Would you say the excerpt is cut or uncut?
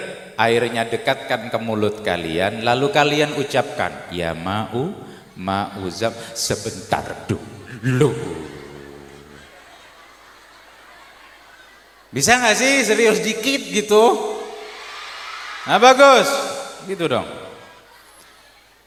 uncut